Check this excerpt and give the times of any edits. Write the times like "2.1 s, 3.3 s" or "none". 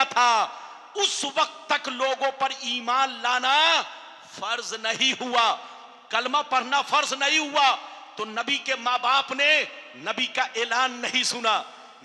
none